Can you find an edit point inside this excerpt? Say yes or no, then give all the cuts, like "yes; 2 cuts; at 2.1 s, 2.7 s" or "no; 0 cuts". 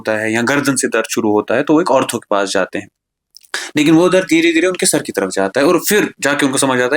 no; 0 cuts